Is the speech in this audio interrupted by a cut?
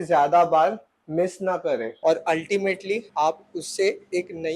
yes; 1 cut; at 1.9 s

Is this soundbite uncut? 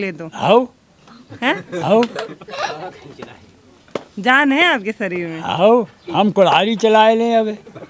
yes; 0 cuts

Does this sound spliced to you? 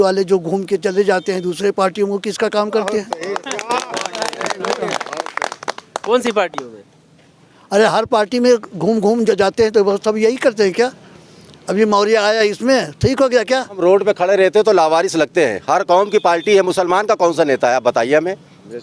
yes; 1 cut; at 13.8 s

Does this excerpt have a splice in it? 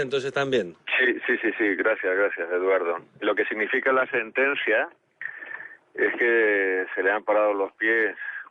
no; 0 cuts

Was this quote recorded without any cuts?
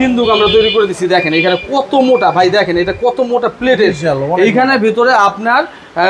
yes; 0 cuts

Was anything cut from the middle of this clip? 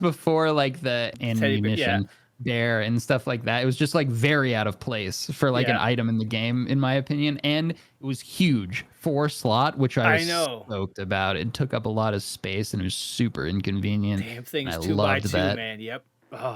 yes; 1 cut; at 1.2 s

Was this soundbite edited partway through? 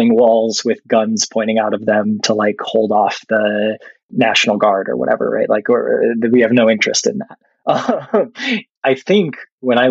yes; 1 cut; at 8.7 s

